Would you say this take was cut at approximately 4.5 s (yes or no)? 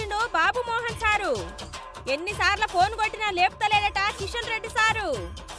no